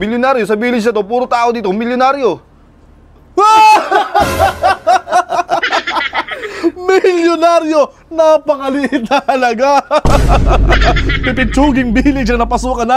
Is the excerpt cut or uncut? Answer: uncut